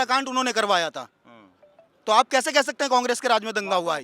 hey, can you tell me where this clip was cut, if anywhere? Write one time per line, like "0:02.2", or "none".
none